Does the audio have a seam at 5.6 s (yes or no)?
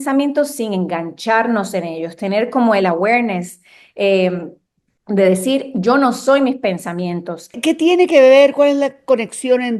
no